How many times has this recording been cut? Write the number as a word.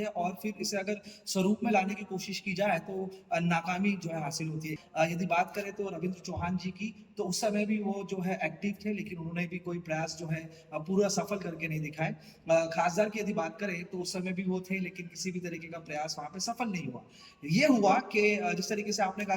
one